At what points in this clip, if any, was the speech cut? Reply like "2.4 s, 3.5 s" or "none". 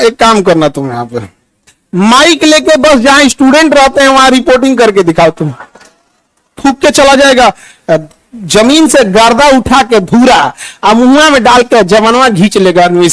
6.6 s